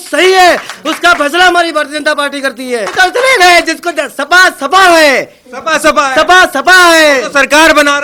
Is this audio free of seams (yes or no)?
no